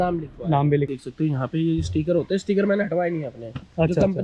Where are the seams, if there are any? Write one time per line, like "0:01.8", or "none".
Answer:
0:00.9